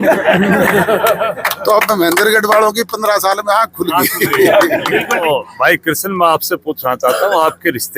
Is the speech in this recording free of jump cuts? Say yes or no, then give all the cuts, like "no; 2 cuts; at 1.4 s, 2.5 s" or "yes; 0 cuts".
no; 1 cut; at 5.2 s